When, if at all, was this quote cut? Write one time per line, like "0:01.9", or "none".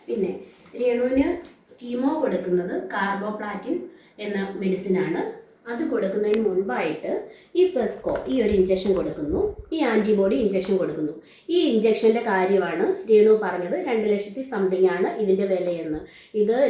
none